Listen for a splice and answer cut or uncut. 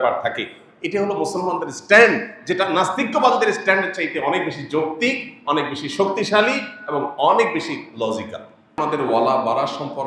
cut